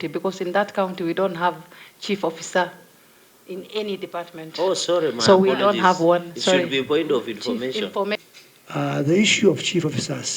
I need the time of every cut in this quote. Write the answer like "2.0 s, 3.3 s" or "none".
8.2 s

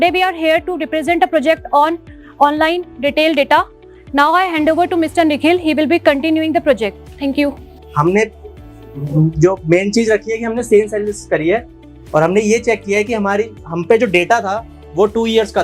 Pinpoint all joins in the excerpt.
none

